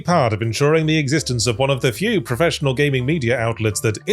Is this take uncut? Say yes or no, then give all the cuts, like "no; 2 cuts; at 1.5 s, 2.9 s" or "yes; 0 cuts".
yes; 0 cuts